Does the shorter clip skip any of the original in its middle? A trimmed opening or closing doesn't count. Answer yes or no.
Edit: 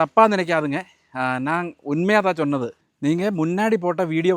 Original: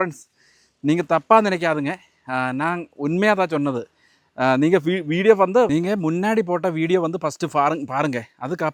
yes